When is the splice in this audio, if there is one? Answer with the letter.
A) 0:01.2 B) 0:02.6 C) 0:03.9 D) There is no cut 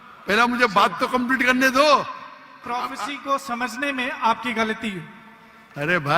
B